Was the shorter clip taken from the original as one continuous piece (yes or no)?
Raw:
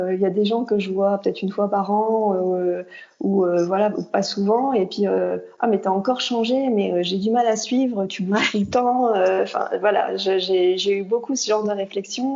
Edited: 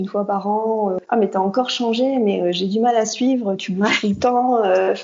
no